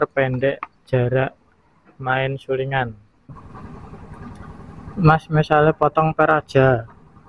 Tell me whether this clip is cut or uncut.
cut